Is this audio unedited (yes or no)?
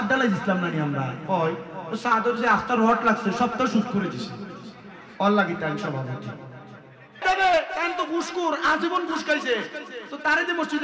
no